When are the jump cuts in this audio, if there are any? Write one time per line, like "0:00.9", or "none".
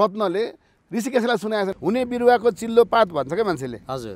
0:01.7